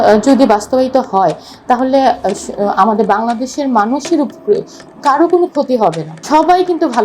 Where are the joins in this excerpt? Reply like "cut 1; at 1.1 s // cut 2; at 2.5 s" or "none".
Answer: cut 1; at 6.1 s